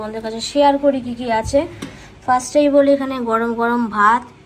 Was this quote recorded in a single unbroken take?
yes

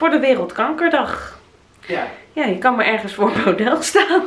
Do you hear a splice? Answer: no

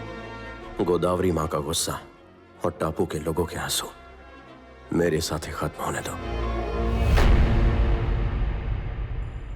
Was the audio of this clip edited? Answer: yes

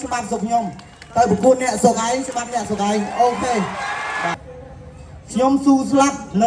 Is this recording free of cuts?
no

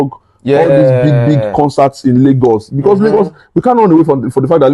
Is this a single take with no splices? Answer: yes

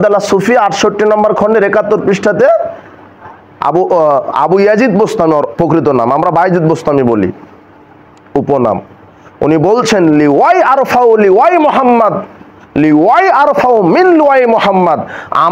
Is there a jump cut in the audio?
no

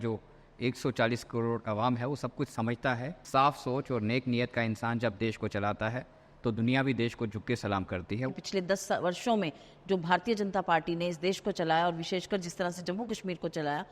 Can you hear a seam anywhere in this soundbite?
yes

